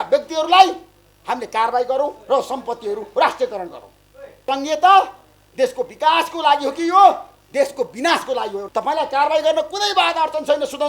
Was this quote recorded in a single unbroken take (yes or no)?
no